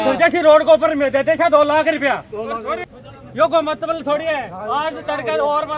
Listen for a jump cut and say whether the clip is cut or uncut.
cut